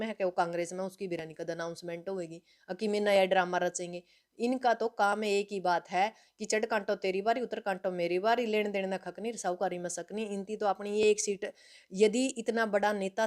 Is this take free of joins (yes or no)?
yes